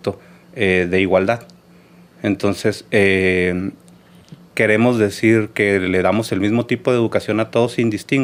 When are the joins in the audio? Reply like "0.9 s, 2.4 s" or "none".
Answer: none